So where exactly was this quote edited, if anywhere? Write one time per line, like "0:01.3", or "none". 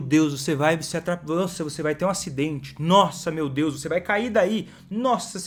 none